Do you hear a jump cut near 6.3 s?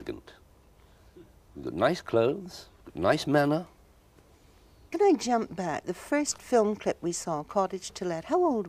no; 1 cut; at 3.8 s

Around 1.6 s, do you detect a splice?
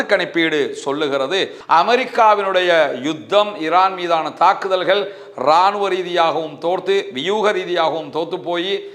yes; 1 cut; at 1.6 s

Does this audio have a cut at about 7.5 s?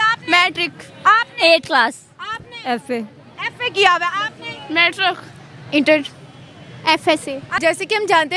yes; 1 cut; at 7.5 s

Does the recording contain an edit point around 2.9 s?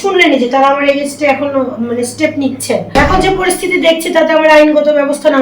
yes; 1 cut; at 2.9 s

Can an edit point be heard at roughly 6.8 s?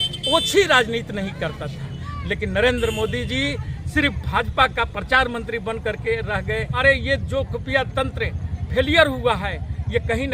yes; 2 cuts; at 2.1 s, 6.8 s

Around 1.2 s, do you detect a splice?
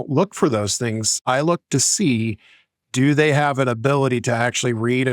yes; 1 cut; at 1.2 s

